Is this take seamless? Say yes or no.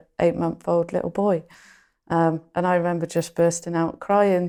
yes